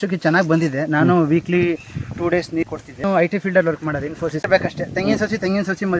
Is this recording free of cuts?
no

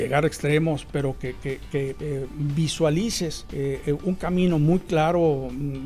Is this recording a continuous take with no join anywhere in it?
no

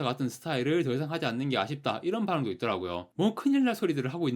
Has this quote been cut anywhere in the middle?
yes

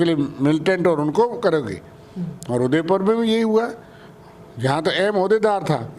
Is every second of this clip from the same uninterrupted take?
yes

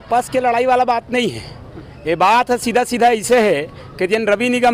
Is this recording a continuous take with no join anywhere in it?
yes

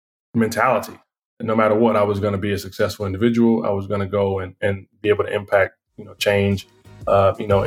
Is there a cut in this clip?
no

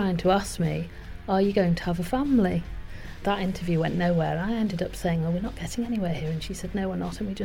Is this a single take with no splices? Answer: no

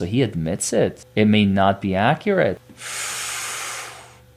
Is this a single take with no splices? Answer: no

